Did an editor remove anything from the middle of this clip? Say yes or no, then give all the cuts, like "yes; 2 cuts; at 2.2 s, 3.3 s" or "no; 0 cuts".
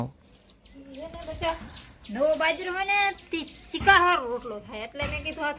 no; 0 cuts